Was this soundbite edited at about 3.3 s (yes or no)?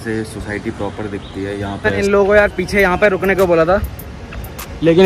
no